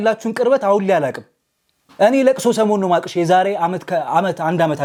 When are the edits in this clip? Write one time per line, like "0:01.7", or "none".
none